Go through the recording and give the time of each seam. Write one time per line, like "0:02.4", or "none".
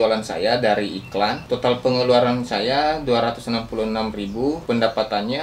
0:01.4
0:04.6